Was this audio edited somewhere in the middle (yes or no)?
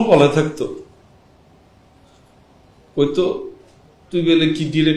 no